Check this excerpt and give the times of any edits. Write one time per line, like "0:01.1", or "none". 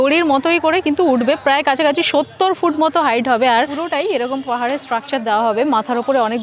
0:03.6